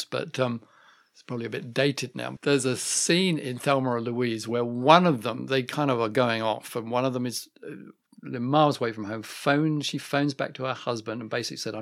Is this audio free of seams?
no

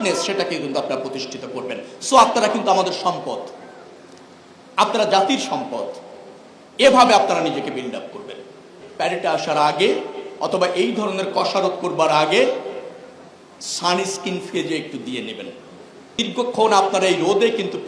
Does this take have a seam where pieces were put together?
yes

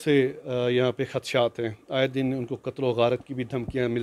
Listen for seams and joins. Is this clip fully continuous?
yes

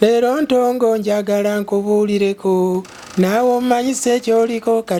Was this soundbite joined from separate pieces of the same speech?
no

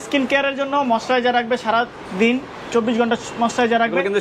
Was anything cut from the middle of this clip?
no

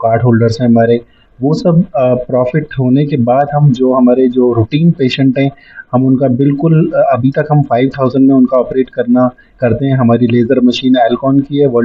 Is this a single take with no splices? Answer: yes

